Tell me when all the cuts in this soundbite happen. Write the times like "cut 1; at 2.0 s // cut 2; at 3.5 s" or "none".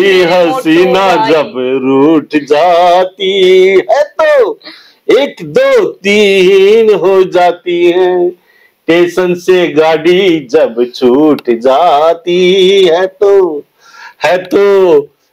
none